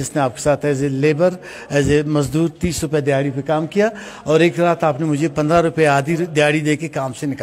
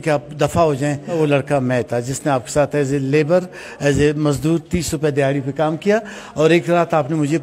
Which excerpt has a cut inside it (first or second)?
second